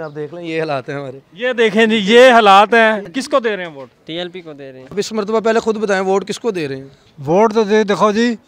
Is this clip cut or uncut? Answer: cut